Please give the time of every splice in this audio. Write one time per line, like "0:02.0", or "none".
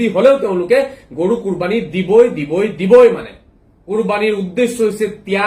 0:03.7